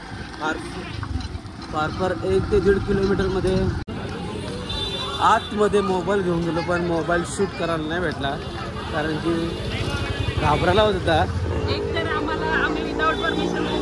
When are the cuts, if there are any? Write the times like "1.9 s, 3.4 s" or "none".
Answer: 3.8 s